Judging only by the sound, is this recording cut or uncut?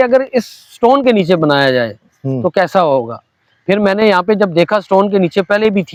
uncut